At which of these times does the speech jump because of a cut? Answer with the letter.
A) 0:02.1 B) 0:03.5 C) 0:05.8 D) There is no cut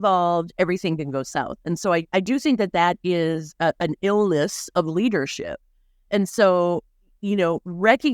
A